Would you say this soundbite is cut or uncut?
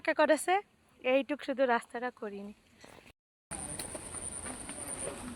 uncut